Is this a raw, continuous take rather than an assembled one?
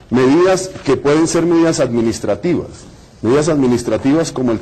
yes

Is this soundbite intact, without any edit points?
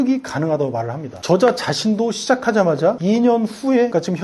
no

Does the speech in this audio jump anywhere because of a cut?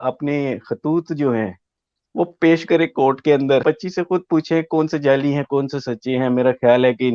yes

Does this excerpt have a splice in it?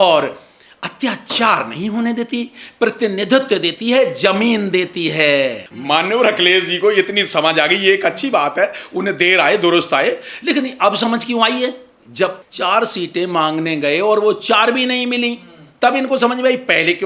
yes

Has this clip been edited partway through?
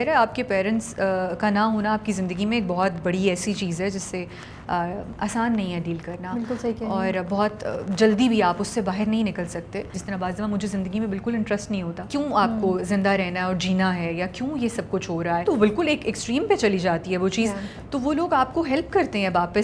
yes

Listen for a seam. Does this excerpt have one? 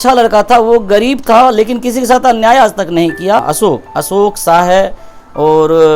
yes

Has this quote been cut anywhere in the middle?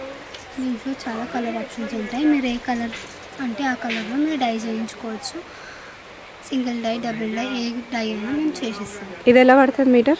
no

